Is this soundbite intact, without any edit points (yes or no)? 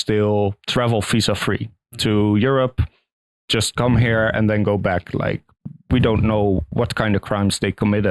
yes